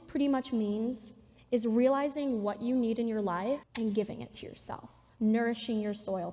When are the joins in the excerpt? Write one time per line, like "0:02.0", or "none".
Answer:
0:03.7